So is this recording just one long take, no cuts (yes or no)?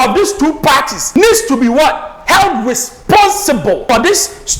no